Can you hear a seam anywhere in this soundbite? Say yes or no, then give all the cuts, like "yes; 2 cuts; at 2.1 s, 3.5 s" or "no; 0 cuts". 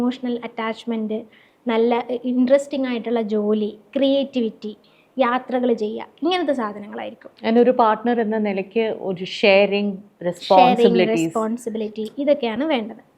no; 0 cuts